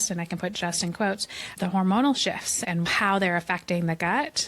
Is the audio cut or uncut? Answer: cut